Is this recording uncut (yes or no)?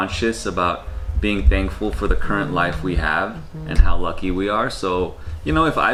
yes